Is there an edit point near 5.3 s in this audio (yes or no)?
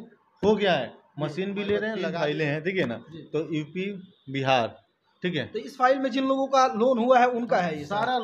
no